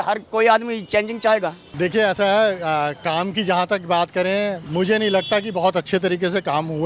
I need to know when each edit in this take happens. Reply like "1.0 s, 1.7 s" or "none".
1.6 s, 4.6 s